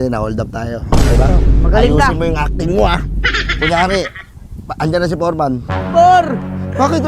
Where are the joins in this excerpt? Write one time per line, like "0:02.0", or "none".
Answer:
none